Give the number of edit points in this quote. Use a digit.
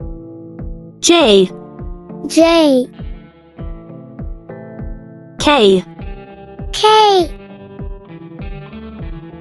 3